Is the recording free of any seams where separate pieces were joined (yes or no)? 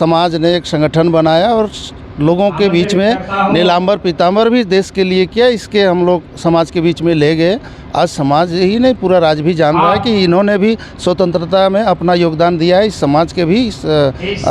yes